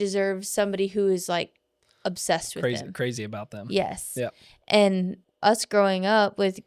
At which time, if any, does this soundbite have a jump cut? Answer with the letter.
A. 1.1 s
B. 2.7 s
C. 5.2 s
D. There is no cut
C